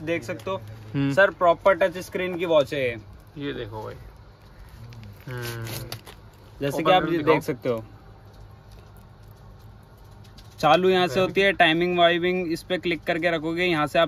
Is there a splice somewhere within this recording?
no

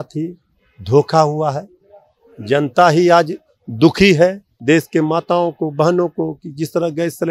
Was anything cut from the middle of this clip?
yes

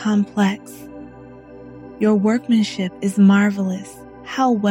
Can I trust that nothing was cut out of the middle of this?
yes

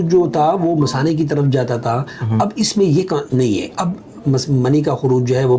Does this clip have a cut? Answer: no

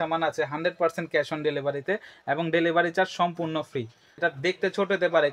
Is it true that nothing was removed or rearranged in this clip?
no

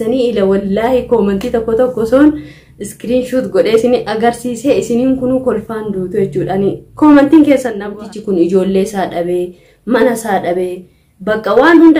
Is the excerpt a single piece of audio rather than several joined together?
no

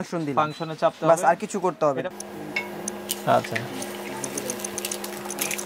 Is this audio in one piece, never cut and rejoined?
no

